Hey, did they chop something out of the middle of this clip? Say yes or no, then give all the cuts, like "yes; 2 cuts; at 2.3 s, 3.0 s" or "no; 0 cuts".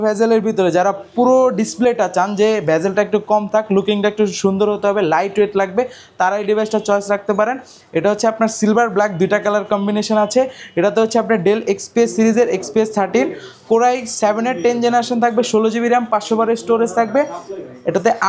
no; 0 cuts